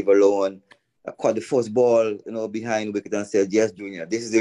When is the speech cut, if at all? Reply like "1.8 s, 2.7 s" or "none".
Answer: none